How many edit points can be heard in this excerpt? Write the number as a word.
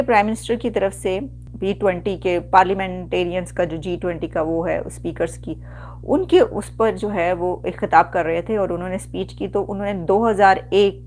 one